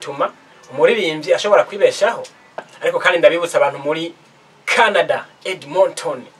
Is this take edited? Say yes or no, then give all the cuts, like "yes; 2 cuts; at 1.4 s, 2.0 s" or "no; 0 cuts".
yes; 1 cut; at 2.7 s